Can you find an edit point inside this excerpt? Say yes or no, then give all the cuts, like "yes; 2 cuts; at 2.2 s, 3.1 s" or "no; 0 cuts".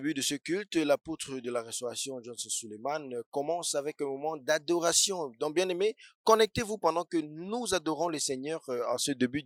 no; 0 cuts